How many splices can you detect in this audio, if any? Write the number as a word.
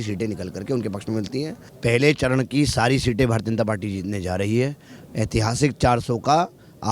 one